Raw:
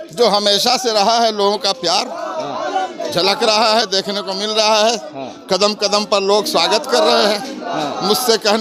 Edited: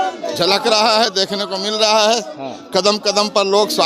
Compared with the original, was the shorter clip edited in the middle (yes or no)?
no